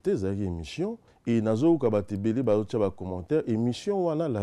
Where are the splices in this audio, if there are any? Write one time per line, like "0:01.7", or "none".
0:01.1